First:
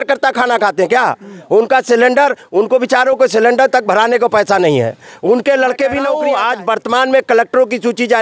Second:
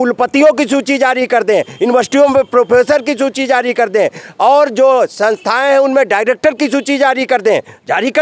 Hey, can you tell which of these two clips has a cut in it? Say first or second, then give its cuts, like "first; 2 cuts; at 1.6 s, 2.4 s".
first; 1 cut; at 6.1 s